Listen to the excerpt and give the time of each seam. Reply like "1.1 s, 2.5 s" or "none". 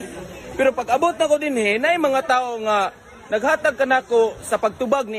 2.4 s